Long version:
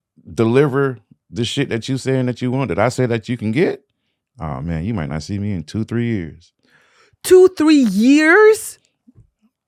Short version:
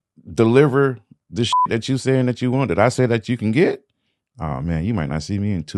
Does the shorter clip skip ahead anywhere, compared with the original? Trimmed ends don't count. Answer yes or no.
no